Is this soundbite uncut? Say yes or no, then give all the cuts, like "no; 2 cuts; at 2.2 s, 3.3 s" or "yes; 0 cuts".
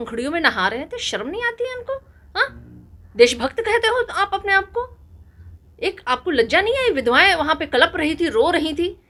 yes; 0 cuts